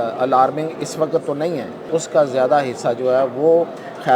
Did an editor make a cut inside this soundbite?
yes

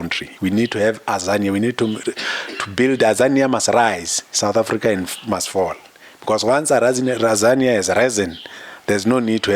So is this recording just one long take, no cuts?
yes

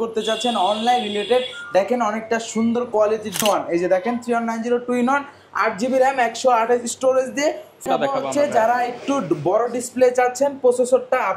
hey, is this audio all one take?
no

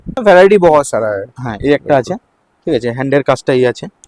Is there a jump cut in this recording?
no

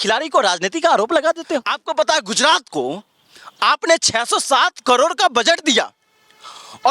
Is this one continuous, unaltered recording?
no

